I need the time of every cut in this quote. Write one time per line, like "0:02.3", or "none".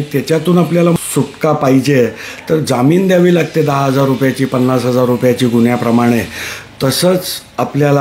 0:01.0